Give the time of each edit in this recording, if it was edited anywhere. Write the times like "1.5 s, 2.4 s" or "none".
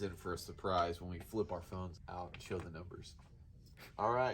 1.9 s